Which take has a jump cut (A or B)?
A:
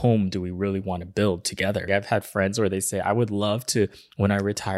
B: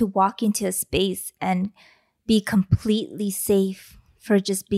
A